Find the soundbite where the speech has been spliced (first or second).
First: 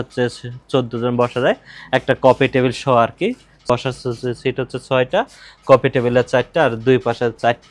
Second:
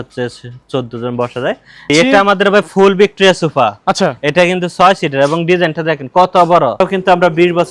second